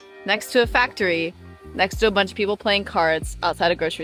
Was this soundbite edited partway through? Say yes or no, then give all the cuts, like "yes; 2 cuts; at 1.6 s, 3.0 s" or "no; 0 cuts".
no; 0 cuts